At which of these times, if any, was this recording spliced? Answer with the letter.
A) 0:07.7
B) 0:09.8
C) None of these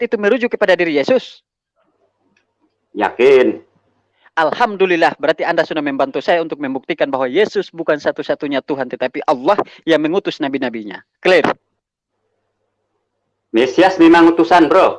C